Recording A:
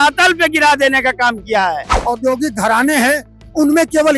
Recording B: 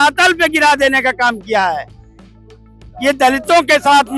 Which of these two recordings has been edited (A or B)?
A